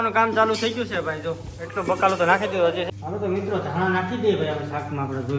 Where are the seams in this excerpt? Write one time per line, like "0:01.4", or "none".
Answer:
0:02.9